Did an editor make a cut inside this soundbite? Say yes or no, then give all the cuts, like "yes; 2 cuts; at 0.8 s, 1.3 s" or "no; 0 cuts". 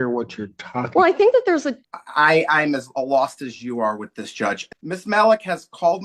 yes; 2 cuts; at 1.8 s, 4.7 s